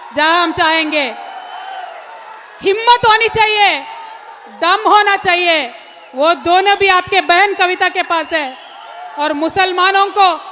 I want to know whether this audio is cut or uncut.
uncut